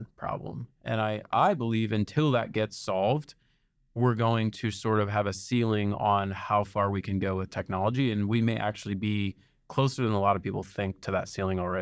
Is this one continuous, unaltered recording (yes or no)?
yes